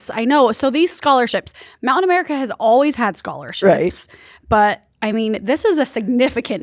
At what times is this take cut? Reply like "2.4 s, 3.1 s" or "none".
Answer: none